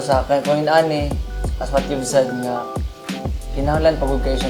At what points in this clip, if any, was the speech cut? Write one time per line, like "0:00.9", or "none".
none